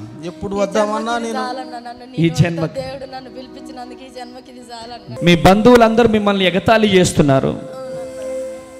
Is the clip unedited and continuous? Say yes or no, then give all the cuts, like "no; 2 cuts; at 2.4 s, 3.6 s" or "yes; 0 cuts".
no; 1 cut; at 5.2 s